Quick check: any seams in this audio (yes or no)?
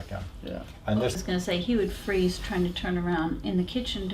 yes